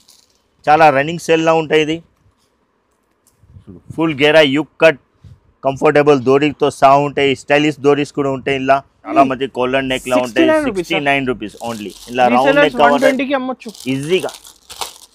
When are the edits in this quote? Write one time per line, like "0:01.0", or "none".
0:09.1